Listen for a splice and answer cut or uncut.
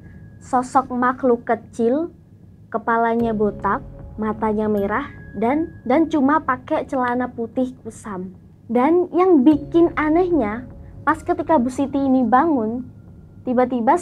uncut